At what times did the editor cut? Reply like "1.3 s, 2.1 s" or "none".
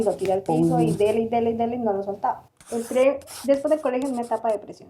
2.5 s